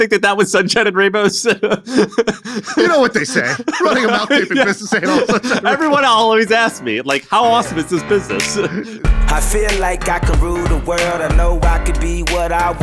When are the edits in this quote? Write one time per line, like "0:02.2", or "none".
0:09.0